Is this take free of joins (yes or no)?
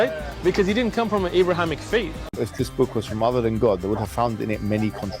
no